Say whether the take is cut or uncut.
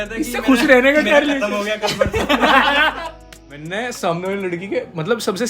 cut